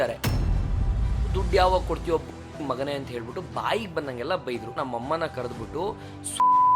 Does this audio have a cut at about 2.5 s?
no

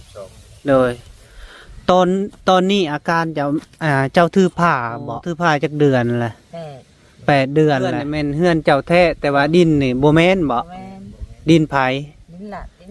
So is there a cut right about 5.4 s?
yes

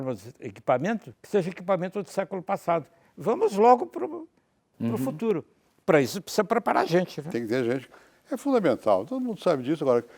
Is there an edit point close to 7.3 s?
no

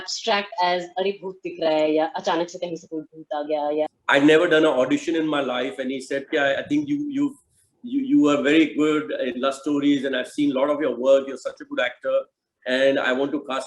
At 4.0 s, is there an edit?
yes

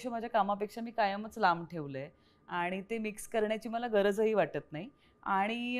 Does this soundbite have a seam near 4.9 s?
no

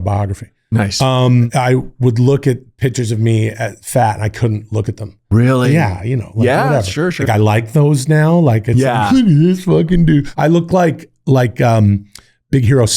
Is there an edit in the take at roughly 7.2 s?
yes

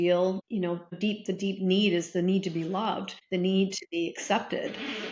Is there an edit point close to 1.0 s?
yes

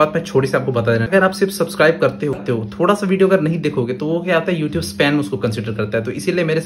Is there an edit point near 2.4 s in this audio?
yes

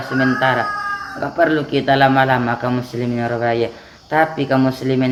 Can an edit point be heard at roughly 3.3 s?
no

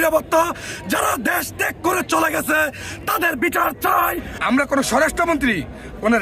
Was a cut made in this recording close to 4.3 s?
yes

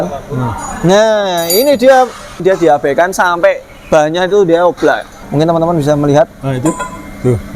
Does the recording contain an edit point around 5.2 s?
yes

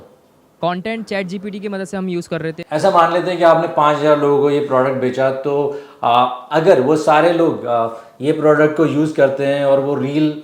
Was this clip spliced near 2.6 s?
yes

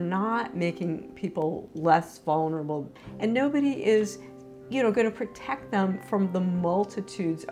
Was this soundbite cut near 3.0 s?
yes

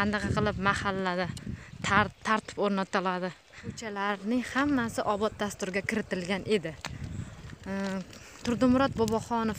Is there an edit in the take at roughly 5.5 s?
no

